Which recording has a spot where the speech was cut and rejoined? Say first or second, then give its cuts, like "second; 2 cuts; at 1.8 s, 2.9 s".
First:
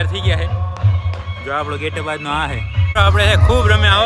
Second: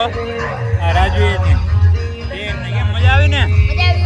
first; 1 cut; at 3.0 s